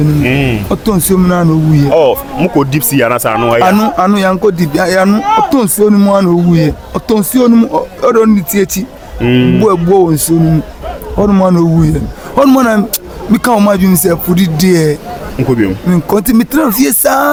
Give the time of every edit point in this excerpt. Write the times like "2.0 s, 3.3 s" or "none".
none